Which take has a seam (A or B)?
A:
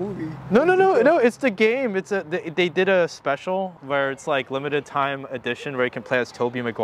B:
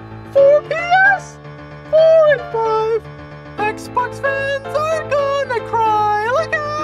A